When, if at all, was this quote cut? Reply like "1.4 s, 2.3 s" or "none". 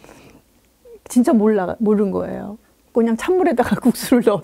2.9 s